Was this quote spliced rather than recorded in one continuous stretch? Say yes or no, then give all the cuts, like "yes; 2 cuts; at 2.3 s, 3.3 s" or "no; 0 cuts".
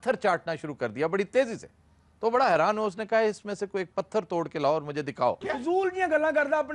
yes; 1 cut; at 5.4 s